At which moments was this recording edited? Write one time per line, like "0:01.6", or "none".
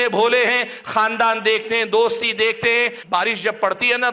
0:03.0